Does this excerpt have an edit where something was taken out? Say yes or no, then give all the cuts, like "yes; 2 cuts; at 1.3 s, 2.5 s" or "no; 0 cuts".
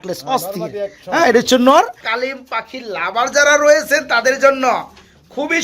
yes; 1 cut; at 2.1 s